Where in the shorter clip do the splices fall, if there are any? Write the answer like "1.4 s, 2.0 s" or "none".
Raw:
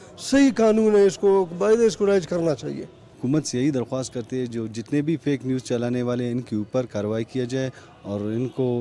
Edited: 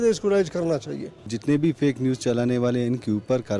1.3 s